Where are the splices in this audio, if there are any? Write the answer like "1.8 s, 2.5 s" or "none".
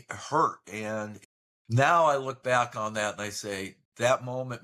1.2 s